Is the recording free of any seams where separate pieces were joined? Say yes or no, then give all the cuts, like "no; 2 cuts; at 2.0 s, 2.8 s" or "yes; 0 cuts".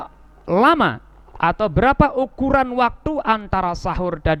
yes; 0 cuts